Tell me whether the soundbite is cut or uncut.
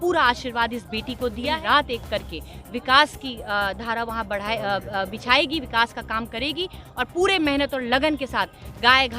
cut